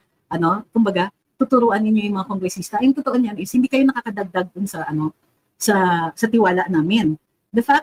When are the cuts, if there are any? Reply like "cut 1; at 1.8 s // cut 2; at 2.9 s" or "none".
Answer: none